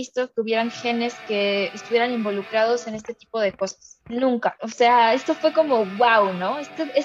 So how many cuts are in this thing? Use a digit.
1